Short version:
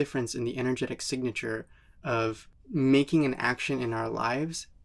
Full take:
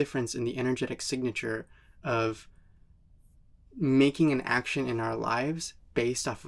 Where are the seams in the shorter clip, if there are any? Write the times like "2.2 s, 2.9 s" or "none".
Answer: 2.5 s